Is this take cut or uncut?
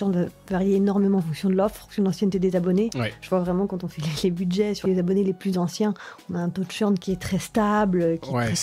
cut